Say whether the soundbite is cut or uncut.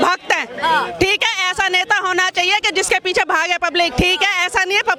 uncut